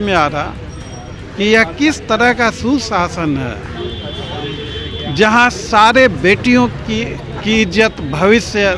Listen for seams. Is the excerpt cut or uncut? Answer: uncut